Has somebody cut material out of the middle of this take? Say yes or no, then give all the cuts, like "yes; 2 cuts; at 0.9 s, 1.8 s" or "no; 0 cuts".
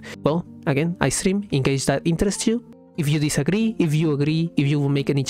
yes; 1 cut; at 2.7 s